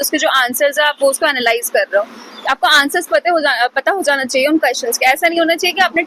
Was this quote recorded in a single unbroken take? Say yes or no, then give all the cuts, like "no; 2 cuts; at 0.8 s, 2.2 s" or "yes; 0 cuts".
yes; 0 cuts